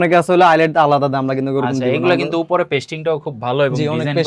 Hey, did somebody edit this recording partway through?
no; 0 cuts

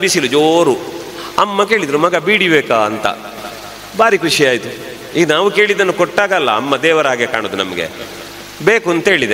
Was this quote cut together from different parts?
no; 0 cuts

